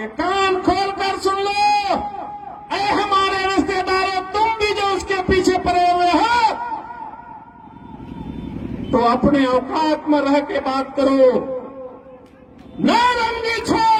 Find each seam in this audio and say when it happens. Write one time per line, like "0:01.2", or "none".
none